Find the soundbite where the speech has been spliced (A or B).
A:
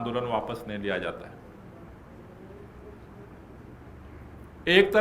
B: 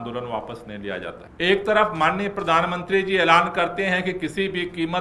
B